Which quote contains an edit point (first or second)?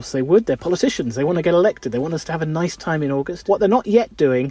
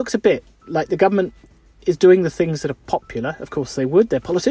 first